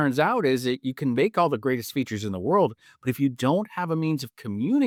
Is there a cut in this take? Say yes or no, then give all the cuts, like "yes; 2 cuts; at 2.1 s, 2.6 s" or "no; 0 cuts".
no; 0 cuts